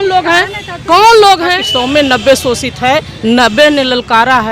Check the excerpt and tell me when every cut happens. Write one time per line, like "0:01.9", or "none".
0:01.7

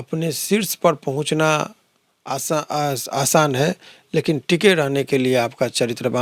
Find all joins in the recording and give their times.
none

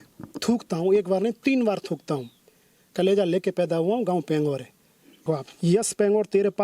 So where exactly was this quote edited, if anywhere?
0:05.2

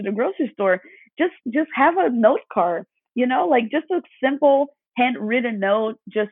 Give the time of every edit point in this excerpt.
none

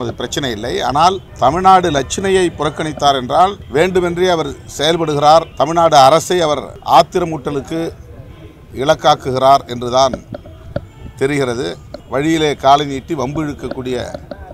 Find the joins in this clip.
0:01.3
0:03.6
0:05.5
0:06.7
0:11.9

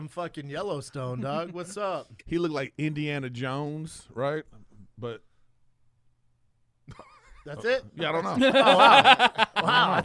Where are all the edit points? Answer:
none

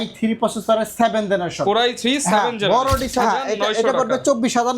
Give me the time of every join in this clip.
0:03.1

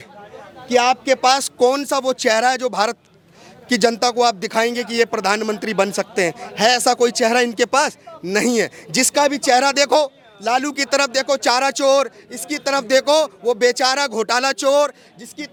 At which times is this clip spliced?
none

